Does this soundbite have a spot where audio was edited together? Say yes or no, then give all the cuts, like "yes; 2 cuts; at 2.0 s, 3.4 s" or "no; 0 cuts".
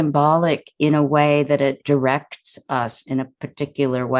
yes; 1 cut; at 1.8 s